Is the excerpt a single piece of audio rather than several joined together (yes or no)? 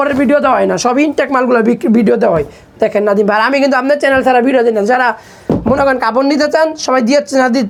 yes